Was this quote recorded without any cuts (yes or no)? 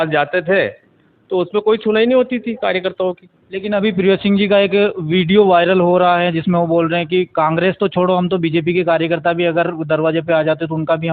yes